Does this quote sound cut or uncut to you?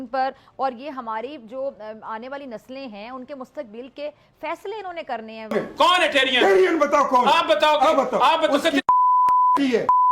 cut